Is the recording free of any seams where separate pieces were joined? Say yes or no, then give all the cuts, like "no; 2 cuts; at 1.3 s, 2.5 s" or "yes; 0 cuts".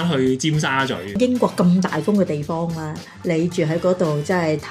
no; 1 cut; at 1.2 s